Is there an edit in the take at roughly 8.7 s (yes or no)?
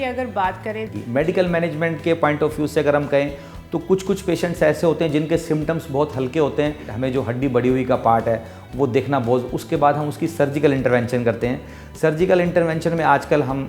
no